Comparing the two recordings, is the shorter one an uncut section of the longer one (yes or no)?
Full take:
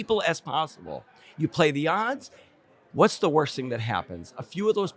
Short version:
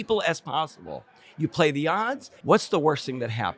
no